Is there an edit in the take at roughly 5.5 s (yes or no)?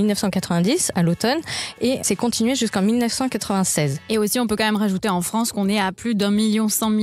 no